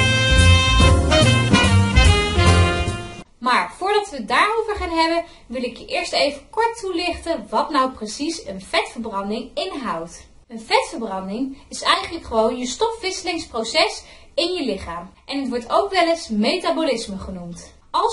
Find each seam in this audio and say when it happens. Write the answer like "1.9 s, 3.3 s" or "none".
none

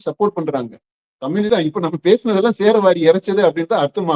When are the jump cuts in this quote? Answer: 1.5 s

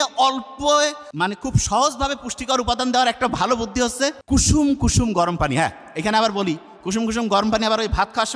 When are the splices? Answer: 1.0 s, 4.2 s

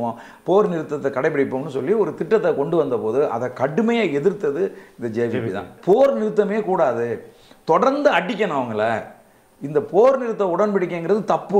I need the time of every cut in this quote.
5.7 s

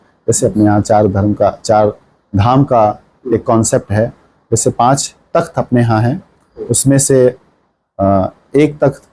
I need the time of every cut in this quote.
none

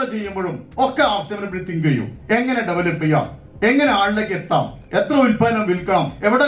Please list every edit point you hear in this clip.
none

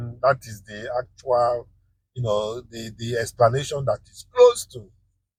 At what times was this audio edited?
none

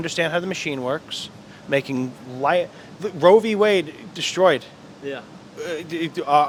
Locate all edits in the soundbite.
none

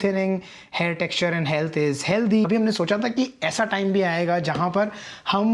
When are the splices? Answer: 2.5 s

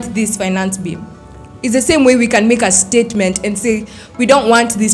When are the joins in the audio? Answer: none

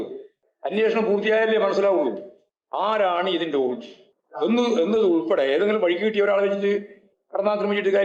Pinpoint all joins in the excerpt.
none

